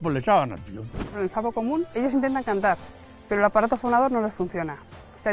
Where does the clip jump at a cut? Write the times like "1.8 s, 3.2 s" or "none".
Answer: 1.1 s, 1.9 s